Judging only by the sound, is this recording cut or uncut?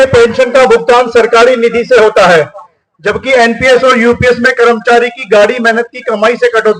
uncut